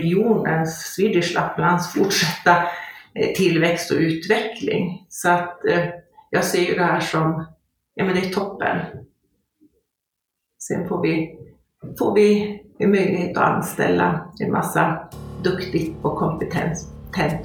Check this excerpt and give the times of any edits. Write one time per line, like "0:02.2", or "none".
none